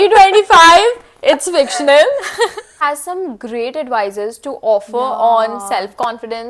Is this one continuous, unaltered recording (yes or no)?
no